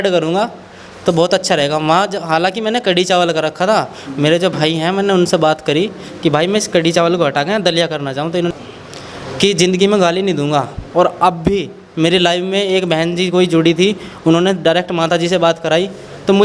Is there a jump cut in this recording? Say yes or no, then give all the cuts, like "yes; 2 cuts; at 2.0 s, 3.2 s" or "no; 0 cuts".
yes; 1 cut; at 8.5 s